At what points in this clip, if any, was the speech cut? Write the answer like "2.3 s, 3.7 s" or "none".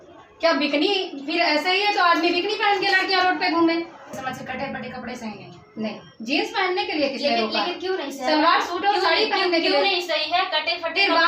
4.1 s